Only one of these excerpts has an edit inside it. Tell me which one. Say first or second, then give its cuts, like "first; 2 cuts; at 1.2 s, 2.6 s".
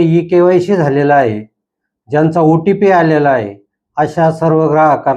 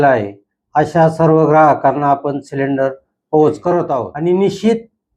second; 1 cut; at 4.1 s